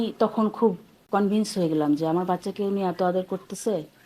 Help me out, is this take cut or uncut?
cut